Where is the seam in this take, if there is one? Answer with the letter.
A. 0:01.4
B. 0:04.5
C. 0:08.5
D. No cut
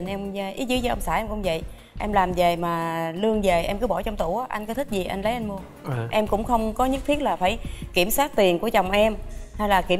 D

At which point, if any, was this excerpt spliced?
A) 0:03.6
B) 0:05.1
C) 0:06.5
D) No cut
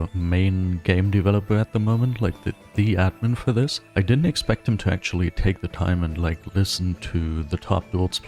D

